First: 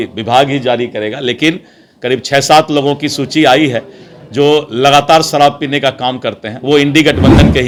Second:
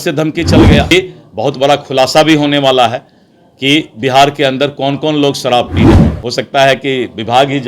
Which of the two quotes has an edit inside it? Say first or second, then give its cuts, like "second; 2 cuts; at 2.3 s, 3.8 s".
second; 2 cuts; at 0.9 s, 6.1 s